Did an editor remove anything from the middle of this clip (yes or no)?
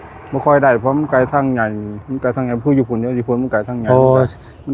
no